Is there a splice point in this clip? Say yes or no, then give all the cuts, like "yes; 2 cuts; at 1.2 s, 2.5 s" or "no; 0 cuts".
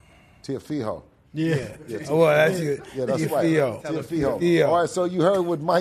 no; 0 cuts